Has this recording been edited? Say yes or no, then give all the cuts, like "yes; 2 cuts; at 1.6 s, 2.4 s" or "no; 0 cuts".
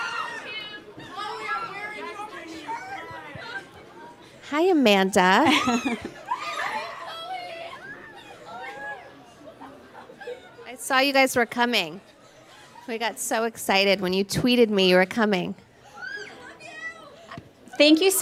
no; 0 cuts